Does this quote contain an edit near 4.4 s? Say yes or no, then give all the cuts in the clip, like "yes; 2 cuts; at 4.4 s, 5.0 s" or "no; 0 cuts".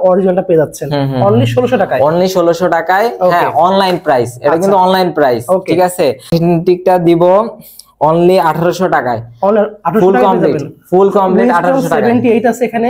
no; 1 cut; at 6.3 s